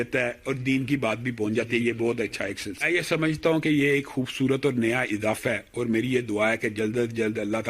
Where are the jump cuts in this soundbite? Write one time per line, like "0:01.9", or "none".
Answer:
0:02.8